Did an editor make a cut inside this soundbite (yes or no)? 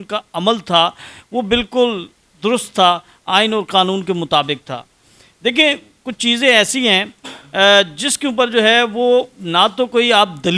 no